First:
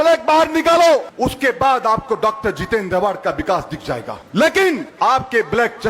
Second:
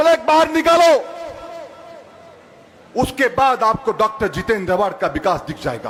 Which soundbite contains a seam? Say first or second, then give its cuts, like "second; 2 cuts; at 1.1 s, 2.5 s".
first; 3 cuts; at 1.1 s, 4.2 s, 4.9 s